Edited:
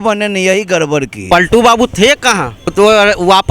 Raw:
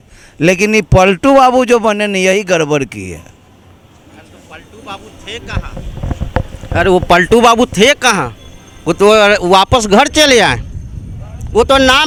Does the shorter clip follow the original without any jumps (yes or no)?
no